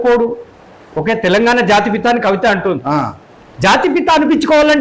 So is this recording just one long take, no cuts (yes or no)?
yes